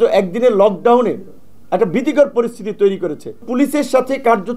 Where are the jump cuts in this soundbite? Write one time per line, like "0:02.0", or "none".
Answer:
0:03.5